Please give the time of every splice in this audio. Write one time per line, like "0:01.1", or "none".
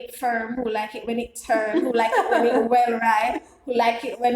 none